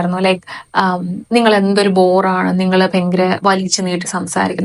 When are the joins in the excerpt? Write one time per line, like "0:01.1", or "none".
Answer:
none